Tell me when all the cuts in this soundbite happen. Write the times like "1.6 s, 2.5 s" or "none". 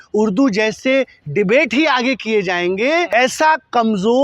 3.1 s